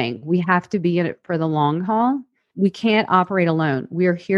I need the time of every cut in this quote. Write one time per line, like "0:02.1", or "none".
0:02.4